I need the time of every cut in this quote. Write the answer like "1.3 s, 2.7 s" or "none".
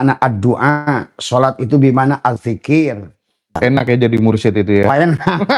3.6 s